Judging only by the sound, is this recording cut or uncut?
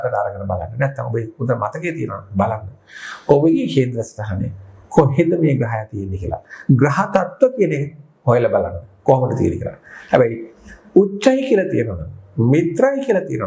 uncut